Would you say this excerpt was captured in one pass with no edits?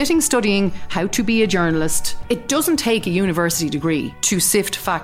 no; 2 cuts; at 2.1 s, 4.1 s

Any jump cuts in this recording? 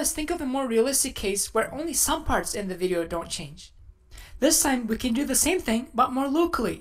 yes; 1 cut; at 5.2 s

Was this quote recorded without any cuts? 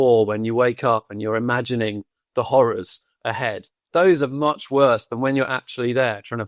yes; 0 cuts

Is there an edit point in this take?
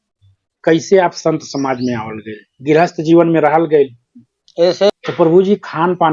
yes; 1 cut; at 4.9 s

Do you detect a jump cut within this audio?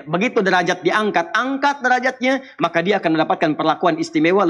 no; 0 cuts

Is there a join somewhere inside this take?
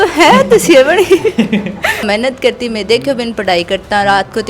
yes; 1 cut; at 2.0 s

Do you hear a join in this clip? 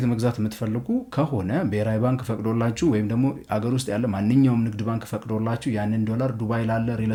no; 0 cuts

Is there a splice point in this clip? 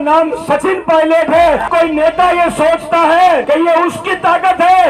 yes; 2 cuts; at 1.7 s, 3.4 s

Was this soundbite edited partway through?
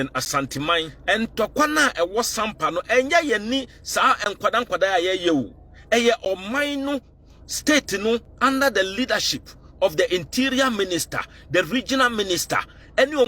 yes; 1 cut; at 0.9 s

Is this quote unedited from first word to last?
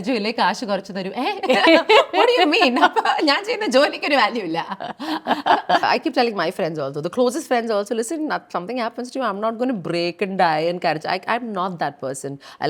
no; 1 cut; at 5.8 s

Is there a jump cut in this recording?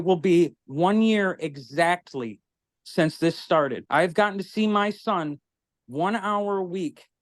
yes; 1 cut; at 3.8 s

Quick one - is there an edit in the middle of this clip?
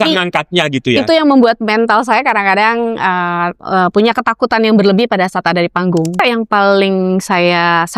yes; 2 cuts; at 3.6 s, 6.2 s

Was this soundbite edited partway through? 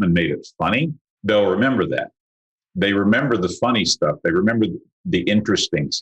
yes; 1 cut; at 1.1 s

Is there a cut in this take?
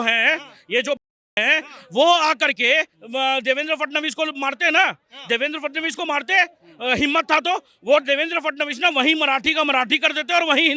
no; 0 cuts

